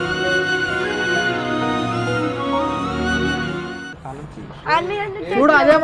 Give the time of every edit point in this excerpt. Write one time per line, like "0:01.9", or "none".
0:03.9